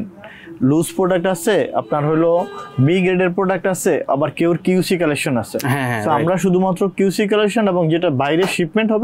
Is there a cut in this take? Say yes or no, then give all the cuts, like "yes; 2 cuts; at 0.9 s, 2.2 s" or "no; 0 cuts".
no; 0 cuts